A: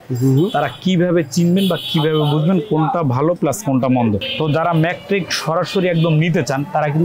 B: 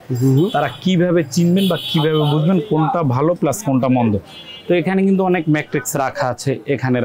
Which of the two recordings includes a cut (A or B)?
A